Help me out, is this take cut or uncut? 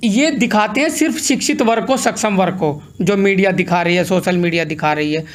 uncut